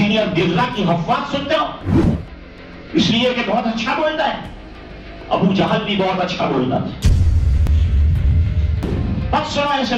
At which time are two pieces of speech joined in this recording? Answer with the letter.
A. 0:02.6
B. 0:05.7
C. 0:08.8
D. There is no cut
C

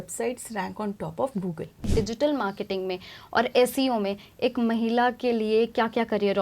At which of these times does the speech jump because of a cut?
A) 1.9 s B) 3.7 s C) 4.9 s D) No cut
A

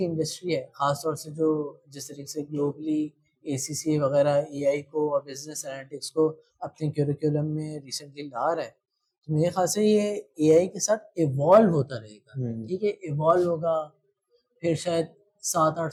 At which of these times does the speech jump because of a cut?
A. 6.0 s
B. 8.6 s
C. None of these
C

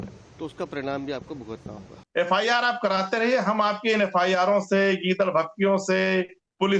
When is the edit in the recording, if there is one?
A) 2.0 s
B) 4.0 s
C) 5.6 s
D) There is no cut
A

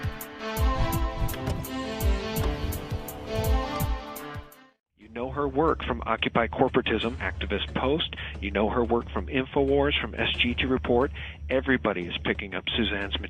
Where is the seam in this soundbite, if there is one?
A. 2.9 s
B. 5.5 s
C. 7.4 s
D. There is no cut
D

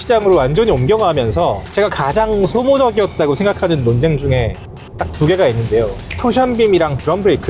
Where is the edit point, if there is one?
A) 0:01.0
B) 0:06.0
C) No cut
B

